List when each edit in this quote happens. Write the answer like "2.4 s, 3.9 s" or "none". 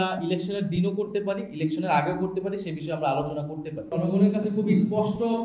3.9 s